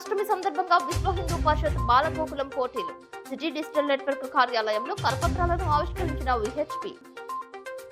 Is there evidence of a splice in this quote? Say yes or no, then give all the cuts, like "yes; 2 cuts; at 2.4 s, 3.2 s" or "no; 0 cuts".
no; 0 cuts